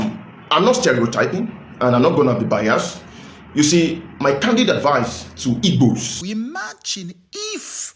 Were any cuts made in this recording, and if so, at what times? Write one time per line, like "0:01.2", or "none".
0:06.1